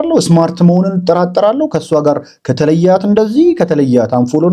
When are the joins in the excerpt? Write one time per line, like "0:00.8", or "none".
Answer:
none